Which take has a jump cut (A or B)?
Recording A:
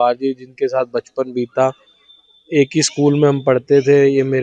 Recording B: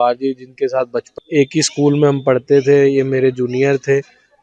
B